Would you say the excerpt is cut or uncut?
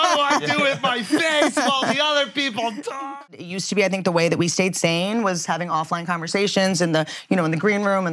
cut